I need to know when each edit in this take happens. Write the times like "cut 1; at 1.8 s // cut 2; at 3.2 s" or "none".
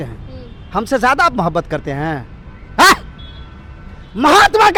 none

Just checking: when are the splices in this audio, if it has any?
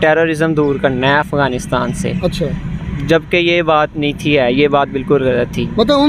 none

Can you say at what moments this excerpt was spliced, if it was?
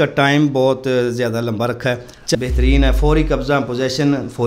cut 1; at 2.3 s

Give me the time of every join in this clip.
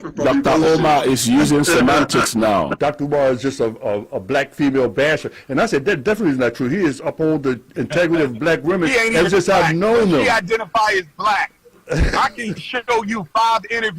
cut 1; at 2.7 s

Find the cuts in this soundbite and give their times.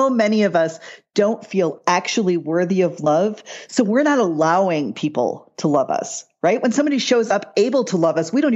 none

